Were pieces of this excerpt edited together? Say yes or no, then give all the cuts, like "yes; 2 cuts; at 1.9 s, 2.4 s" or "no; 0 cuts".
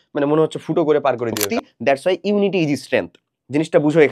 yes; 1 cut; at 1.5 s